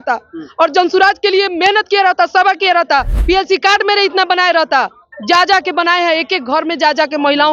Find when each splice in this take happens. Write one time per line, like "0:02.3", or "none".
0:03.1